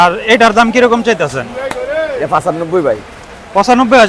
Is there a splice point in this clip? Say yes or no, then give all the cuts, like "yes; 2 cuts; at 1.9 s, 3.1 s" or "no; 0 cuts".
no; 0 cuts